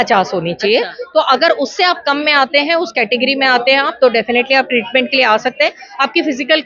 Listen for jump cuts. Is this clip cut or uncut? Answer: uncut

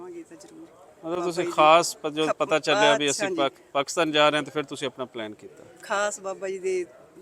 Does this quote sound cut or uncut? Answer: uncut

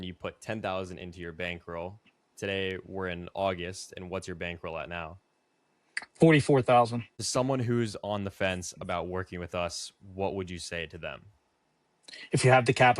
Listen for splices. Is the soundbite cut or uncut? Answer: cut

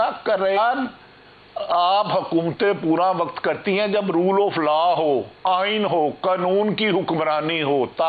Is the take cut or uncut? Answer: uncut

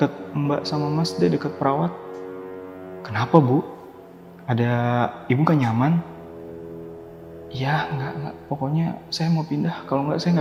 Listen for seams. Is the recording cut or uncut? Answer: uncut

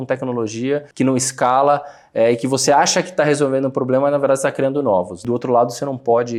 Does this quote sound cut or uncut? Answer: uncut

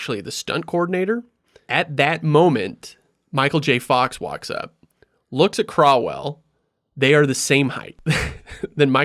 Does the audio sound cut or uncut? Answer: cut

